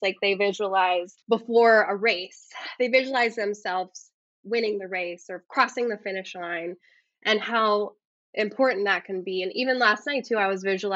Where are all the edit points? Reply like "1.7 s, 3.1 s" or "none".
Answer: 1.1 s